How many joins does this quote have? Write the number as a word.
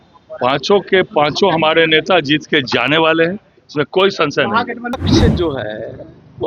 one